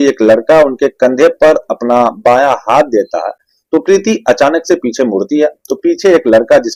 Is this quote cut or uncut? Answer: uncut